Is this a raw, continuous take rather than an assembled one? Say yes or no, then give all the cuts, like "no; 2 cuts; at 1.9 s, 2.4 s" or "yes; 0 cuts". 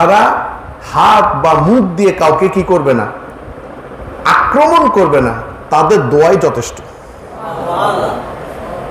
yes; 0 cuts